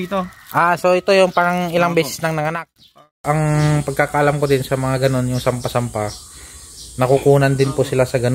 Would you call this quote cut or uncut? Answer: cut